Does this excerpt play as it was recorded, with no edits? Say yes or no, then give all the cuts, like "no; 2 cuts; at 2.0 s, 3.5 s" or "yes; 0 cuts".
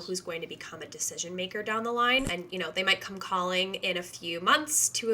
no; 1 cut; at 2.3 s